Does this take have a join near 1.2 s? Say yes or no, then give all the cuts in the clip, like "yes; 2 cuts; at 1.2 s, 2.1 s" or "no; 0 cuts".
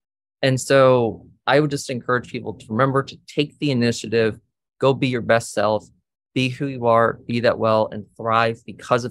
no; 0 cuts